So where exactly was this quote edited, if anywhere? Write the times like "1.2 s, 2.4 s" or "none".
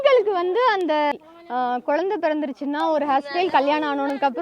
1.1 s